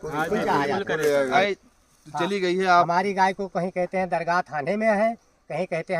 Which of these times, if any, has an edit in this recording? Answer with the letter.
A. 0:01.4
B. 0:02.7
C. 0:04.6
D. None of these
A